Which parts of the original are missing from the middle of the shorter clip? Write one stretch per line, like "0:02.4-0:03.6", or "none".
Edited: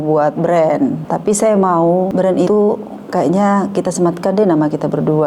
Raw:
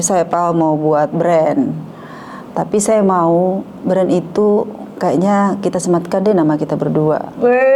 0:01.8-0:02.5
0:03.8-0:04.3